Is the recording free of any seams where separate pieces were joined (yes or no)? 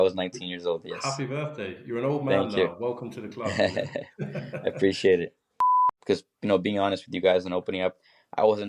no